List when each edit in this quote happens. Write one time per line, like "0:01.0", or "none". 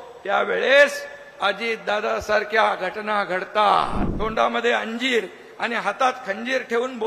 0:04.0